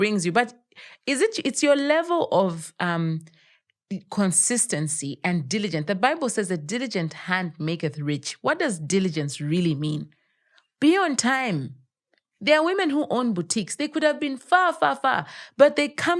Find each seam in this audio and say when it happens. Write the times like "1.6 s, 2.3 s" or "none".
none